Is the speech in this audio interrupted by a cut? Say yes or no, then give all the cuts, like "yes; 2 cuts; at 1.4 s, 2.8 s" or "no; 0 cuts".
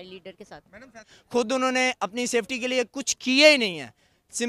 yes; 1 cut; at 1.2 s